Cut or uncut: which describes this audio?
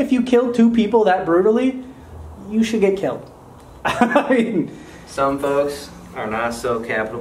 uncut